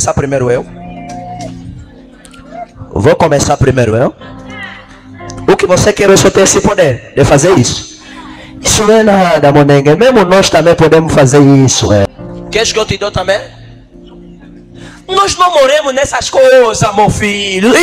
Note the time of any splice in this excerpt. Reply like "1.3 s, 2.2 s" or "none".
12.1 s